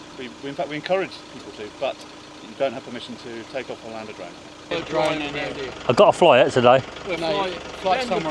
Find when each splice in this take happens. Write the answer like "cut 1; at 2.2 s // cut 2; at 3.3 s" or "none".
cut 1; at 4.7 s